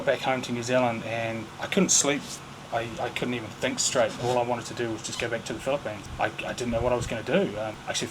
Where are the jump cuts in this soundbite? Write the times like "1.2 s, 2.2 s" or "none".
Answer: none

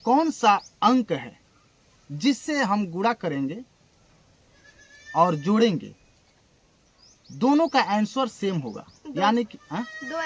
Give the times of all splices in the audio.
none

